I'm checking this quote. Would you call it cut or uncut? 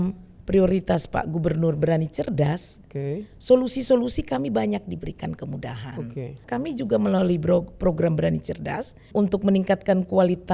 cut